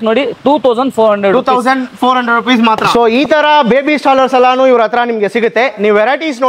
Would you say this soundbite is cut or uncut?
cut